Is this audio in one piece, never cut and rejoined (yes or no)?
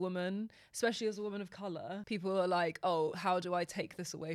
no